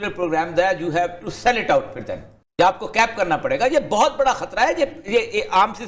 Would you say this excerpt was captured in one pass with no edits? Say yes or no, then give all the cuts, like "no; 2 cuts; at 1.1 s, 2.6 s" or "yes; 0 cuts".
yes; 0 cuts